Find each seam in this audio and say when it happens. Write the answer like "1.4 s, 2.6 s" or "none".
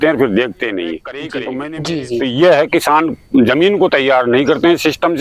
1.6 s